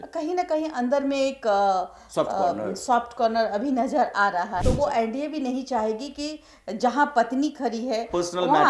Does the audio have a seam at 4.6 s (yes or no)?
yes